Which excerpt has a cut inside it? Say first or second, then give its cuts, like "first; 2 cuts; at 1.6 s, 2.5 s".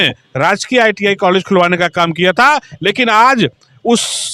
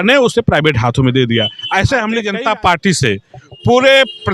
second; 1 cut; at 2.2 s